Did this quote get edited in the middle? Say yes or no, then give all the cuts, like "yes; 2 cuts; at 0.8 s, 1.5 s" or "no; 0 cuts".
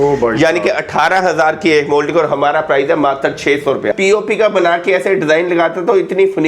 yes; 1 cut; at 3.9 s